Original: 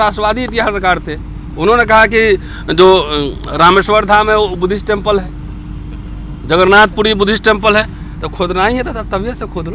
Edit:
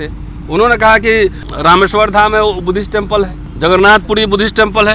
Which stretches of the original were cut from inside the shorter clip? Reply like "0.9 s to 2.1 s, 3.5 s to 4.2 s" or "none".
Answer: 2.5 s to 3.4 s, 5.4 s to 6.3 s

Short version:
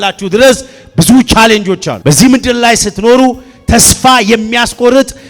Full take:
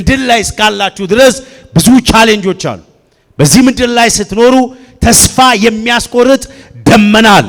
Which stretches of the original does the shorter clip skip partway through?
2.7 s to 3.2 s

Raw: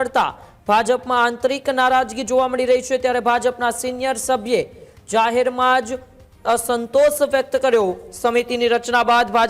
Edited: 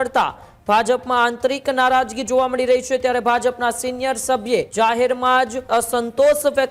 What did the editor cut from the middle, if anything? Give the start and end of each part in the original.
4.7 s to 5.1 s, 5.9 s to 6.3 s

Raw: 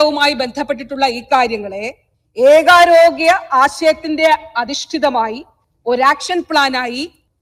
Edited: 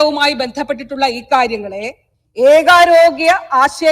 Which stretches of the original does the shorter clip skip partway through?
none

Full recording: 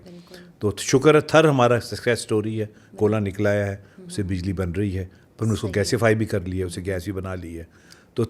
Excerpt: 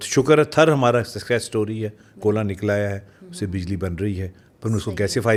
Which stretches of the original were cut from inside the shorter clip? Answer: none

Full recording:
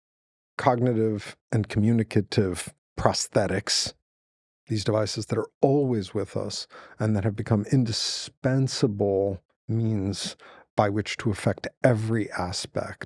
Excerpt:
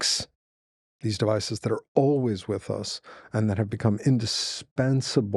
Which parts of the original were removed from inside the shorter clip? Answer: none

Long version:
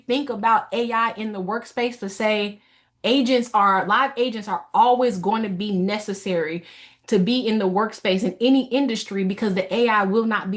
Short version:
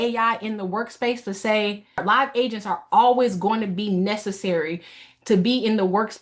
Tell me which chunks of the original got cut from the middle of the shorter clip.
2.8 s to 3.8 s

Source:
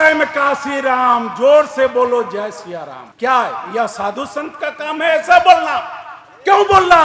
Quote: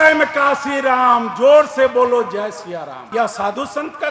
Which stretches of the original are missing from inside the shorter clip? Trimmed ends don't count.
3.0 s to 3.6 s

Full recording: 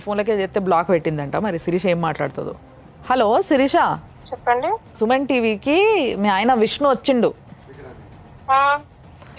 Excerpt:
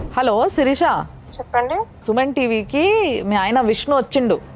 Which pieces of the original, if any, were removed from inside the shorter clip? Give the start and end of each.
none

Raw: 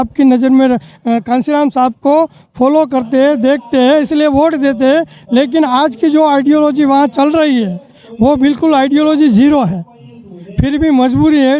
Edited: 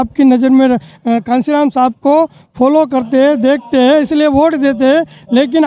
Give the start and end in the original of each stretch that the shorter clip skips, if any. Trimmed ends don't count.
none

